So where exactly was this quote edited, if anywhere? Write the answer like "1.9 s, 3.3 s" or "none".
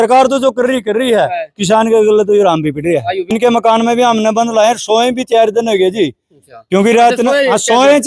3.3 s